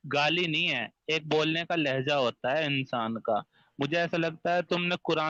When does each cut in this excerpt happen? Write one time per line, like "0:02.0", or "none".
none